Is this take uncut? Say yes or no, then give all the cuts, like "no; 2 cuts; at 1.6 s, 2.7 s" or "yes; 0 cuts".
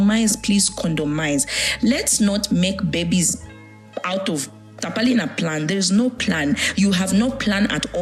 yes; 0 cuts